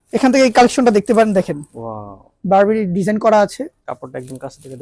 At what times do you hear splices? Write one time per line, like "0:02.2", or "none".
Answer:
none

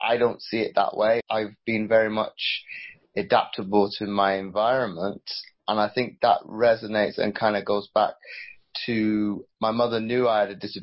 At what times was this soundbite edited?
none

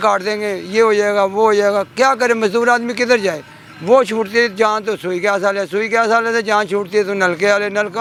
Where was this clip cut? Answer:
none

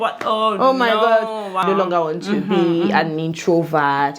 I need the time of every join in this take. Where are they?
0:01.6

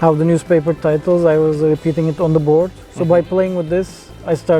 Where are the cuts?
none

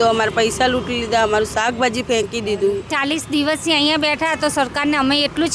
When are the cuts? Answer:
0:02.9

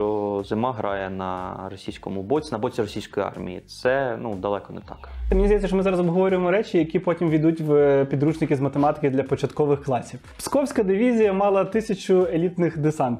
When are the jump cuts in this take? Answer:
0:05.3
0:10.3

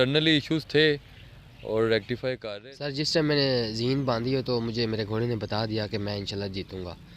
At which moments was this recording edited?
0:02.4

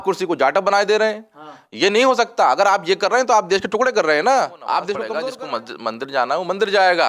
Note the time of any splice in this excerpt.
0:05.1

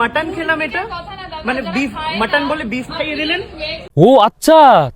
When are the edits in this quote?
0:03.9

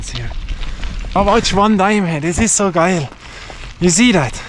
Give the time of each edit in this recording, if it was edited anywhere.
0:01.2

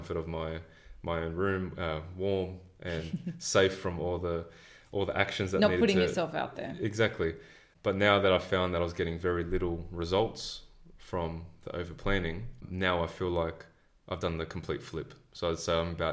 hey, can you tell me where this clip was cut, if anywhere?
0:12.6

